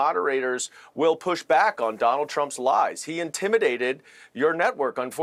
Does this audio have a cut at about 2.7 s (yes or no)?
no